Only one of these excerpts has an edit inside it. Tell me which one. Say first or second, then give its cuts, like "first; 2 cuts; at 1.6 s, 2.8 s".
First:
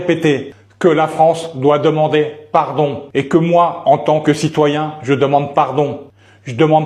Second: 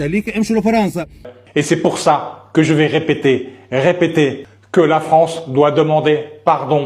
second; 1 cut; at 1.3 s